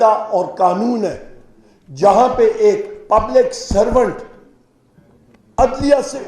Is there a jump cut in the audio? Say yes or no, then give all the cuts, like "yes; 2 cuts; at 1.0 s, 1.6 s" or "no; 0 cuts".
no; 0 cuts